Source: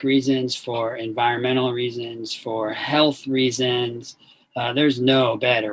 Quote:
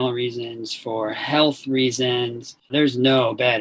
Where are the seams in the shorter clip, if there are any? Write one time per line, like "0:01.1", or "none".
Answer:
0:02.7